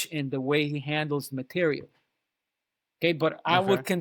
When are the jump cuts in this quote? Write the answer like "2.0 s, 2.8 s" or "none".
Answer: none